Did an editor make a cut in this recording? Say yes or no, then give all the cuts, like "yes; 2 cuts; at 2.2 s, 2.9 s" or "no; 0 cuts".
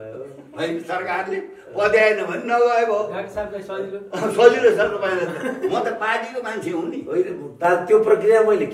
no; 0 cuts